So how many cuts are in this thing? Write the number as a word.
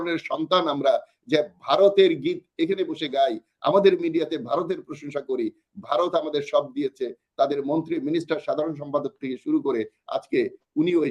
zero